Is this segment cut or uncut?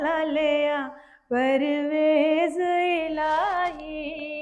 uncut